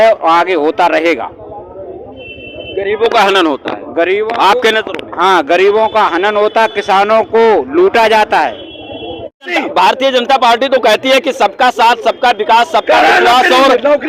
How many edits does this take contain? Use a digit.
1